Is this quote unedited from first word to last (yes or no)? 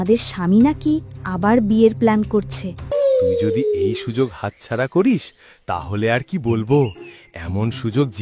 no